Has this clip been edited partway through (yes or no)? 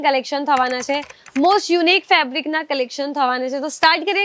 no